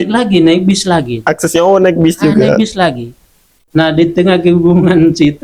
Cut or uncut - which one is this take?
uncut